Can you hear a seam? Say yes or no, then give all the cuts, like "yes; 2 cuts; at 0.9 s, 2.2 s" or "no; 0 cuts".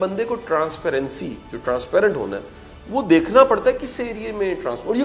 no; 0 cuts